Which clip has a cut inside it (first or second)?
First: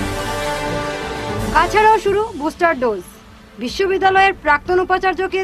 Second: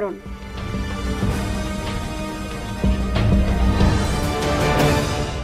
first